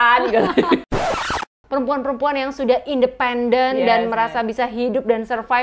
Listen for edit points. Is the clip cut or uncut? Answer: cut